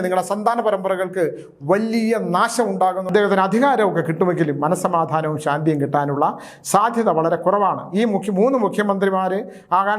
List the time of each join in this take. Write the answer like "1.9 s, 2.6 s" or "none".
3.1 s

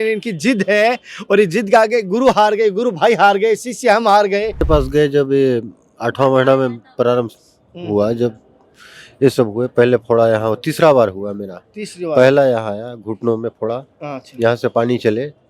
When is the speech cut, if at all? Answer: 4.6 s

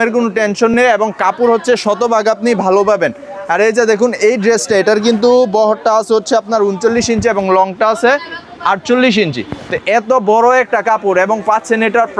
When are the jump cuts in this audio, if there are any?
none

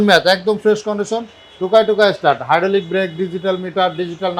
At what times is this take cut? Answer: none

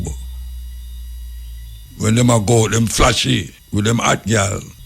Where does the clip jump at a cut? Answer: 1.8 s, 3.6 s

